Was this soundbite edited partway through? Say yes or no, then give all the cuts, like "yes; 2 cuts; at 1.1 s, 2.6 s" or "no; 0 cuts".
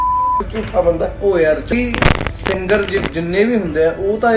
yes; 1 cut; at 1.7 s